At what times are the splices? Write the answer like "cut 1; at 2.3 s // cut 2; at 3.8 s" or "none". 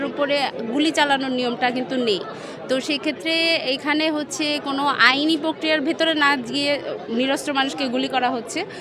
none